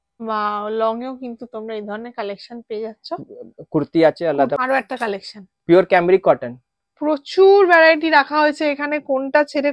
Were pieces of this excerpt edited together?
yes; 1 cut; at 4.6 s

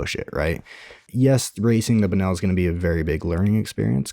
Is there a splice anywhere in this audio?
yes; 1 cut; at 1.0 s

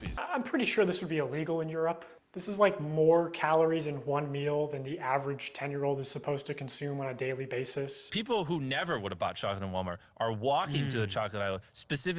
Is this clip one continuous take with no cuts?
no; 1 cut; at 8.1 s

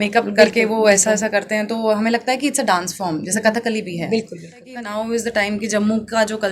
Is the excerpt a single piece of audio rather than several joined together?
no; 1 cut; at 4.7 s

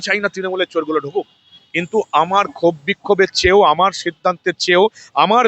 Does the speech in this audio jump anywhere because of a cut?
no; 0 cuts

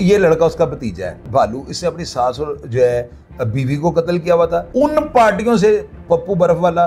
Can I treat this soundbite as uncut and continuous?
no; 2 cuts; at 1.2 s, 4.7 s

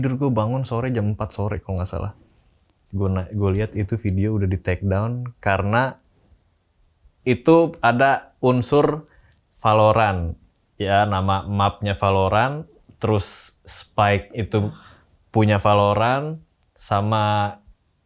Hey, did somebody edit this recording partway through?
no; 0 cuts

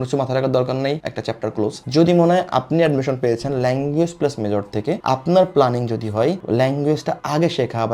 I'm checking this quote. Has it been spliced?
no; 0 cuts

